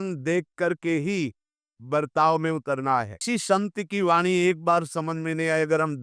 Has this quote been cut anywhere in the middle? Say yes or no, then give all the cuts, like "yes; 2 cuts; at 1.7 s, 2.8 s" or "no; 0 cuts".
yes; 1 cut; at 3.2 s